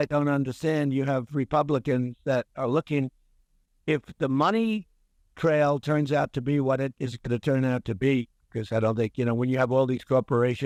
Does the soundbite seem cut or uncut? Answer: uncut